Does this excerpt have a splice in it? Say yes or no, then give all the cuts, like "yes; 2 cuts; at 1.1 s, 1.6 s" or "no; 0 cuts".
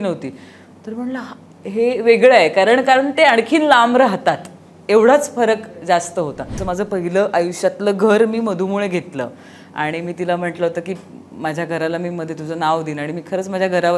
yes; 1 cut; at 6.6 s